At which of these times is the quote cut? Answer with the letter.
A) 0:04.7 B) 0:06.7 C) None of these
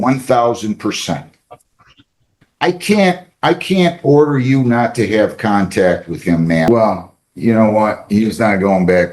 B